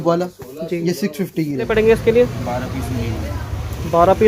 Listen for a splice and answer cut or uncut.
cut